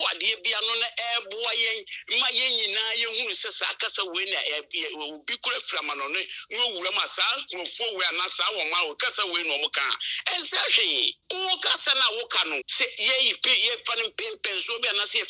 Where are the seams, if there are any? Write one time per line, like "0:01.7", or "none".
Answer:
0:11.2
0:12.7